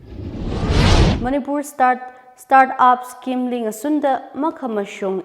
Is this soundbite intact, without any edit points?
no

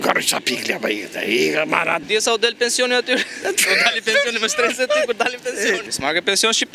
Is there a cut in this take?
yes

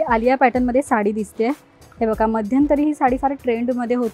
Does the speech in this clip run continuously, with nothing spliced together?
yes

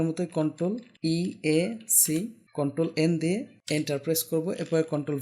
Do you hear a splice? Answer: yes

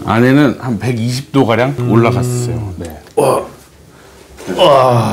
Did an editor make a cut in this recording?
yes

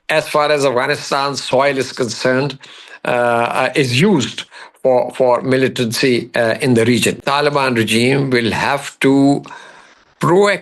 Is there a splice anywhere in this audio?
yes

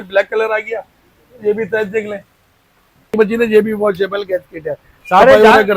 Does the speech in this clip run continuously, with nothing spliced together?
no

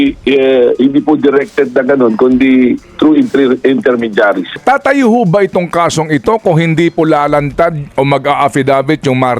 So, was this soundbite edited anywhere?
yes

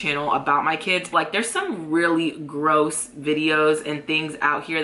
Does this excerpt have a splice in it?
yes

